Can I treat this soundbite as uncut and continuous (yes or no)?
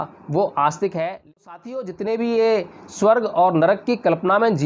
no